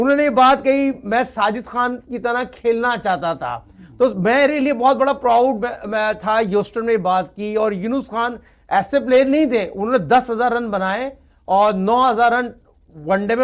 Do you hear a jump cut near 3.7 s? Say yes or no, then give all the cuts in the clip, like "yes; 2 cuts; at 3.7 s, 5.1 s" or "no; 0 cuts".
no; 0 cuts